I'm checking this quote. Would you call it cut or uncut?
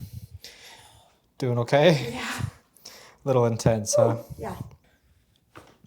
cut